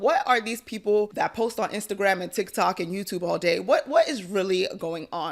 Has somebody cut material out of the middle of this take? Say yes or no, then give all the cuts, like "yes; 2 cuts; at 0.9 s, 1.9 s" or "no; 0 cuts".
yes; 1 cut; at 1.1 s